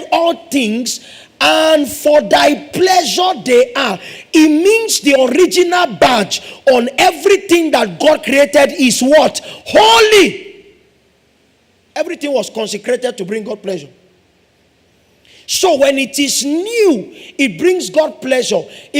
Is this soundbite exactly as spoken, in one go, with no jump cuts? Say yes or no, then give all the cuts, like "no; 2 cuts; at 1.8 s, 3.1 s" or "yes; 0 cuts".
yes; 0 cuts